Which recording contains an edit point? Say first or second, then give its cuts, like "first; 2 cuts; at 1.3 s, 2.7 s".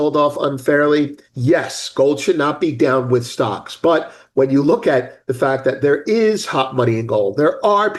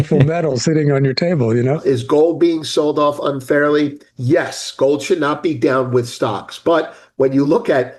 second; 1 cut; at 1.8 s